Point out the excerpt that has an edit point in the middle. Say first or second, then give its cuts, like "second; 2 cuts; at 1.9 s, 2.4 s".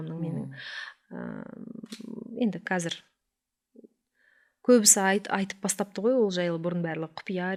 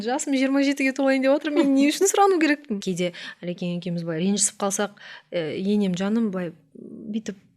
second; 1 cut; at 2.8 s